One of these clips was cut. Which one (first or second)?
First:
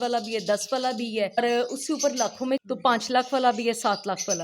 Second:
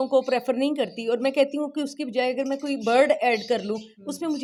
first